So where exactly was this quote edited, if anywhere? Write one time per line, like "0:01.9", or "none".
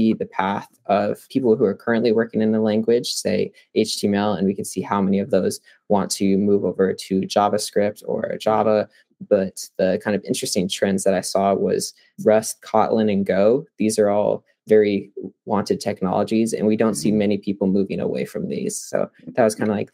none